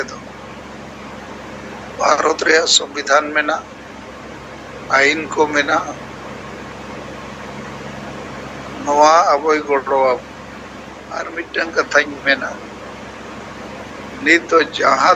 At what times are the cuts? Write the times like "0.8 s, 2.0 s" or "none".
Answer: 11.3 s